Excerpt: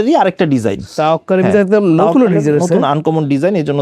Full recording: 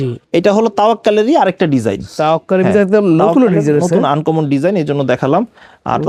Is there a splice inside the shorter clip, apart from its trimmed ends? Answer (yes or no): no